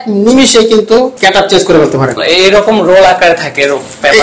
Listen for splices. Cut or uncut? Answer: cut